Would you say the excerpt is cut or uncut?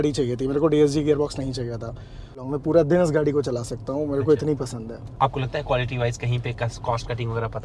cut